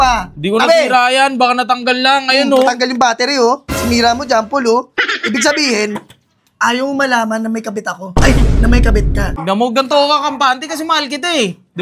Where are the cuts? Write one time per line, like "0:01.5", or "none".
0:09.3